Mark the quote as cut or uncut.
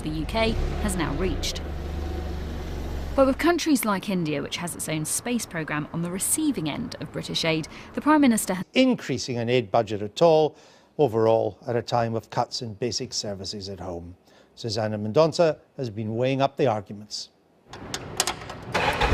uncut